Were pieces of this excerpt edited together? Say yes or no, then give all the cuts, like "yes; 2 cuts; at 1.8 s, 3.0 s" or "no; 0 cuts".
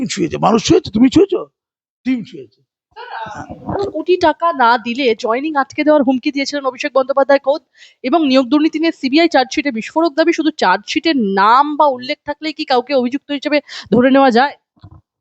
no; 0 cuts